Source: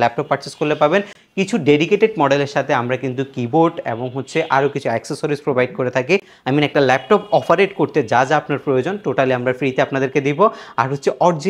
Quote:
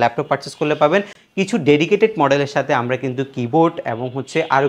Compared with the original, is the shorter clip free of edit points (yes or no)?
yes